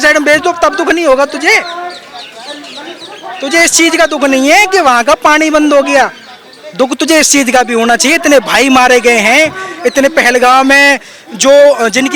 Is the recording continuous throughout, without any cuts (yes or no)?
yes